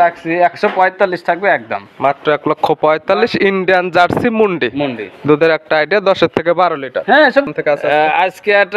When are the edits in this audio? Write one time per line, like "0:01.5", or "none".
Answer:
0:07.5